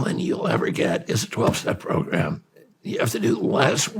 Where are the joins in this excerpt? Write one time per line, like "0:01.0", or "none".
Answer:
none